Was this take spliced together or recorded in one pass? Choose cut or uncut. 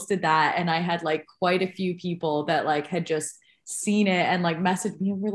uncut